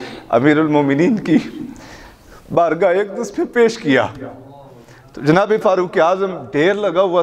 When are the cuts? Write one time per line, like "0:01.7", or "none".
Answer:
none